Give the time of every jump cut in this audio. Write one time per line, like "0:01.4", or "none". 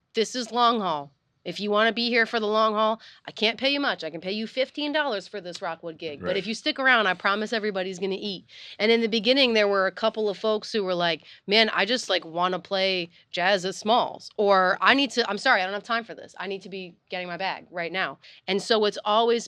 0:18.3